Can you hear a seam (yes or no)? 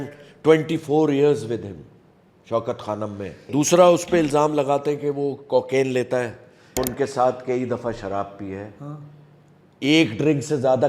yes